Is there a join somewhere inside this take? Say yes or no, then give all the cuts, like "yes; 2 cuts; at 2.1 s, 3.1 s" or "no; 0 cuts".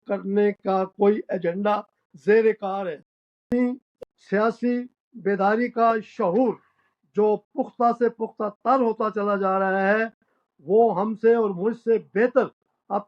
yes; 1 cut; at 3.5 s